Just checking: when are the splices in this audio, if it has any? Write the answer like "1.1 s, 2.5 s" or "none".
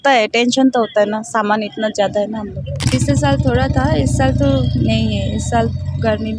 2.6 s